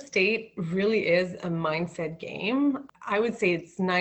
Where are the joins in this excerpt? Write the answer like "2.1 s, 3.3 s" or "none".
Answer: 2.8 s

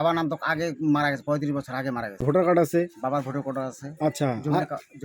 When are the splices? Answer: 2.2 s

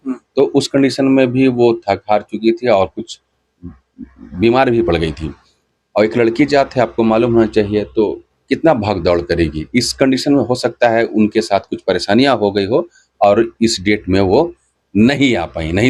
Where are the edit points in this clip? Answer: none

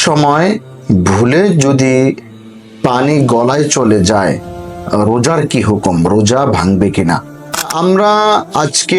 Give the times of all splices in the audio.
7.7 s

